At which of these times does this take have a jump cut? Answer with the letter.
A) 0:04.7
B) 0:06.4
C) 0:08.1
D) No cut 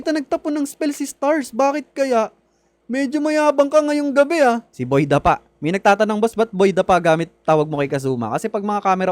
A